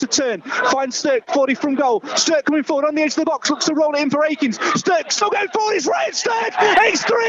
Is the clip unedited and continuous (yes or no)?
yes